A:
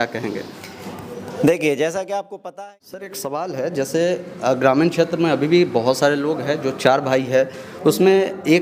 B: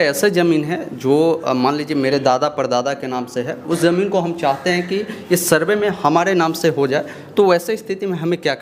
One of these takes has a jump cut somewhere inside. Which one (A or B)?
A